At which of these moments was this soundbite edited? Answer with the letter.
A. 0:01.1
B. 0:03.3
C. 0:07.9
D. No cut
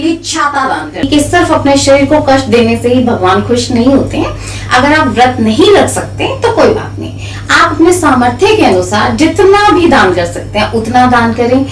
A